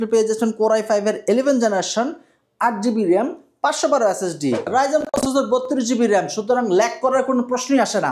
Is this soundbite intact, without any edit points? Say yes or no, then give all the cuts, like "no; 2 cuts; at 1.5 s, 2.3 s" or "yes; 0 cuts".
no; 1 cut; at 4.6 s